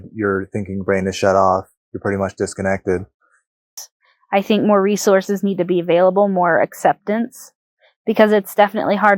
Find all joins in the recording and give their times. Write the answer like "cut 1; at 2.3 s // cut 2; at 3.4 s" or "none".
cut 1; at 3.7 s